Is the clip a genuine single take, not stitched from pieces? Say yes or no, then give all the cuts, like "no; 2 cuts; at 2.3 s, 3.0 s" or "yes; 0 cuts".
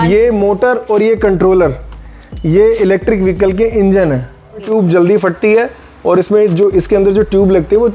no; 1 cut; at 4.7 s